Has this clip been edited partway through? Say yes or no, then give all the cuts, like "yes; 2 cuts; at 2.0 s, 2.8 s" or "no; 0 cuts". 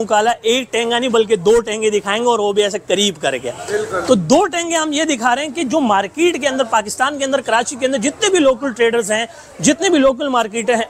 no; 0 cuts